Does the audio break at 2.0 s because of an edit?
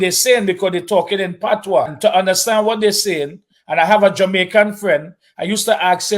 yes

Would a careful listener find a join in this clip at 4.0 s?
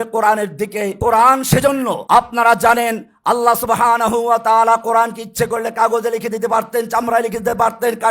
no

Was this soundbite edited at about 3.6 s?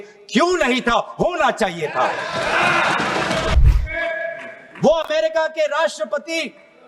yes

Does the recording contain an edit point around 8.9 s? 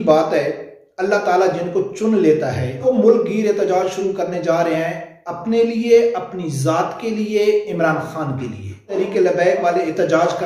yes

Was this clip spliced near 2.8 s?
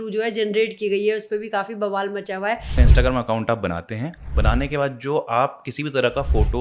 yes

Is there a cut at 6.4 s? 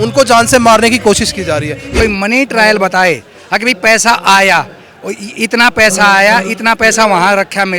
no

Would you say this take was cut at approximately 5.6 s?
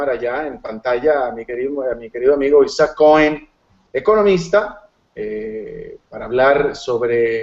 no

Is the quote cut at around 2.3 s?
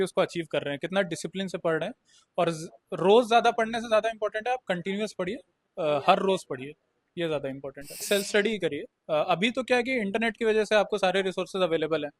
no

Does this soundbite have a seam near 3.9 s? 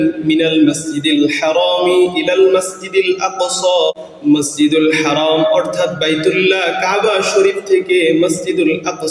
yes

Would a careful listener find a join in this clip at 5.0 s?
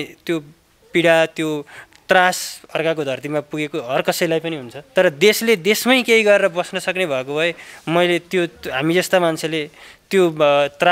no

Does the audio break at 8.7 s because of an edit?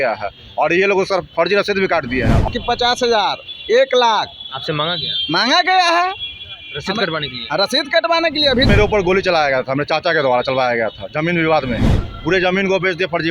yes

